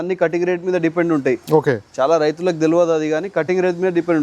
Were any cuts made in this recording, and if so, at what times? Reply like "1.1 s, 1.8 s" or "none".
none